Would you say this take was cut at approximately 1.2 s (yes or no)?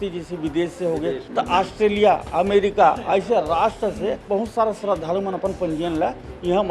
yes